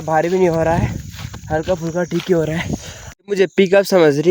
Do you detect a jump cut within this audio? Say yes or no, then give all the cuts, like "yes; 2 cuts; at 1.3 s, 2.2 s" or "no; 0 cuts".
yes; 1 cut; at 3.1 s